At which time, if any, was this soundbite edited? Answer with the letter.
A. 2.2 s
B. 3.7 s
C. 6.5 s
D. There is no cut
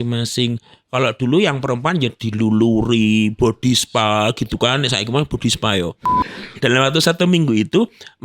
C